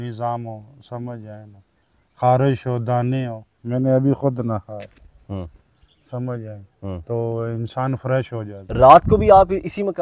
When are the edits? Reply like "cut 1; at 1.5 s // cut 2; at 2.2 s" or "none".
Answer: none